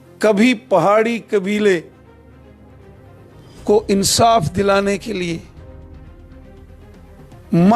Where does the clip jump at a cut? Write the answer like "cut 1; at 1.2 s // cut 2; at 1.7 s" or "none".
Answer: none